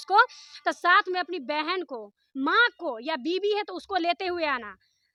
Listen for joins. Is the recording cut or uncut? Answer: uncut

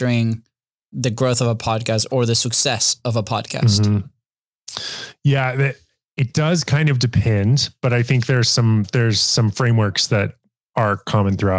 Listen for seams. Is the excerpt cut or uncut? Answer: uncut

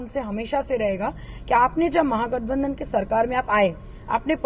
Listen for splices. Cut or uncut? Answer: uncut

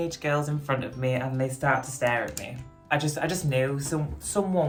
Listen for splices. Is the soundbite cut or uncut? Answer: uncut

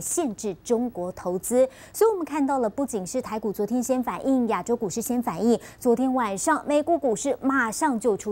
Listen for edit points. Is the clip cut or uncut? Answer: uncut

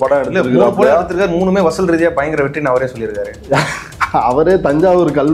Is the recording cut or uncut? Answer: uncut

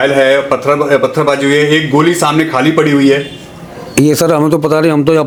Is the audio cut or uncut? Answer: uncut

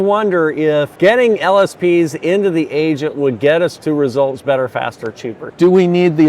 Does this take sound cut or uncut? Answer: cut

